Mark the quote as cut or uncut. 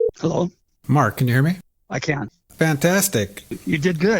cut